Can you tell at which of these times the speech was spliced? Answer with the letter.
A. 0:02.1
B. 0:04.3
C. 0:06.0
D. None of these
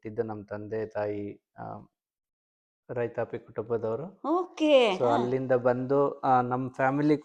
D